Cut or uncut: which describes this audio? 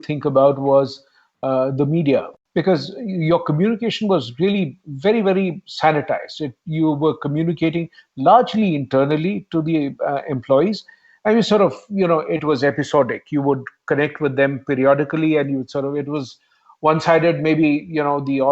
cut